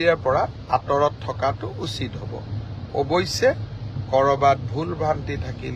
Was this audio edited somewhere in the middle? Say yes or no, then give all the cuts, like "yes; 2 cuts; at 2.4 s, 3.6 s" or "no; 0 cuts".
no; 0 cuts